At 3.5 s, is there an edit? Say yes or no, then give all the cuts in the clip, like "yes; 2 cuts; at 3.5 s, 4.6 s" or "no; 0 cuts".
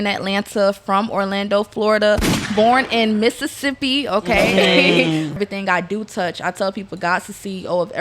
no; 1 cut; at 5.4 s